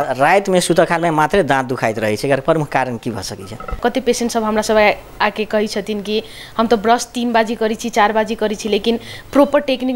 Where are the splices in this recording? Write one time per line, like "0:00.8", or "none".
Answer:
0:03.8